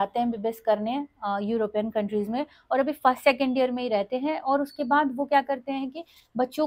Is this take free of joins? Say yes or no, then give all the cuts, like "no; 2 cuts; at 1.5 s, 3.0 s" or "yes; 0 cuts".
yes; 0 cuts